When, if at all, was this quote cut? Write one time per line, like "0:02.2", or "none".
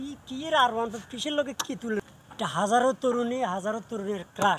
0:02.0